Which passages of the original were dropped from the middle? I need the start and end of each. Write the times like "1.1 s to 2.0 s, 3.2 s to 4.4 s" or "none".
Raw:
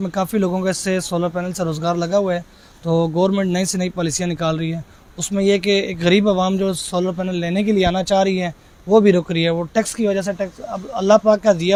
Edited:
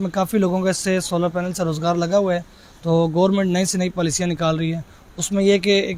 none

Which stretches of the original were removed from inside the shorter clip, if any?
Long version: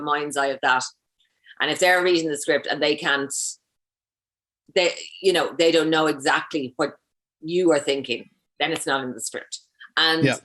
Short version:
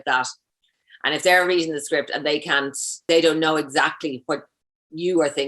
3.6 s to 5.5 s

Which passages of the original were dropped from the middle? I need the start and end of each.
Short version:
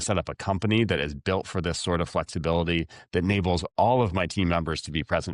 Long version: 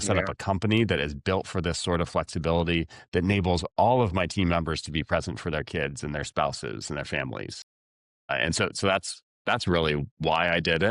none

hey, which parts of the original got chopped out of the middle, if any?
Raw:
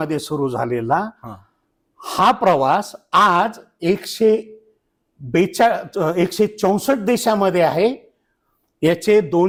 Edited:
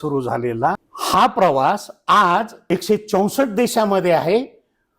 1.2 s to 2.0 s, 3.7 s to 6.2 s

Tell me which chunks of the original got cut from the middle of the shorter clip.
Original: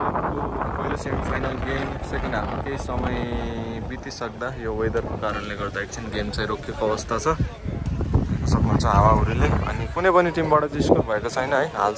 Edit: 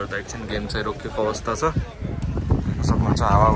none

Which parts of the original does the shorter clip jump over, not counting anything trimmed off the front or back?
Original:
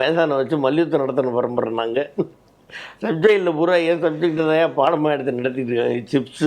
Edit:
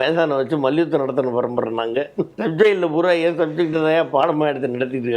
2.3 s to 3.0 s

